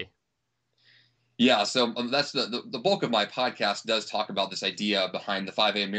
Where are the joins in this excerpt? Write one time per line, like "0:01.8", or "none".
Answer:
0:01.2